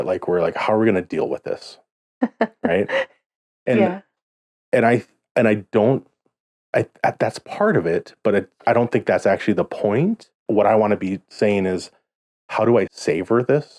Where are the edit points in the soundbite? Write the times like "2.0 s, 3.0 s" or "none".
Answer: 10.4 s